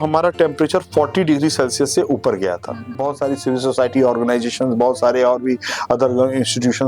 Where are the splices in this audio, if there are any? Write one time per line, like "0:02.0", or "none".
0:03.0